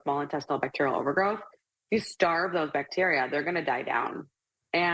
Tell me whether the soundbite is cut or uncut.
uncut